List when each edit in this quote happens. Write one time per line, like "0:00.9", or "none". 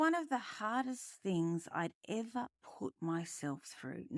none